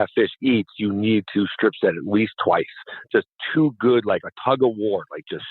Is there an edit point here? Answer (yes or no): yes